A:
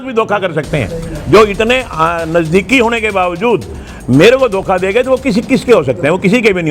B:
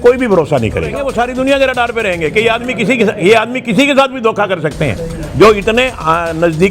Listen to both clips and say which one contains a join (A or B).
B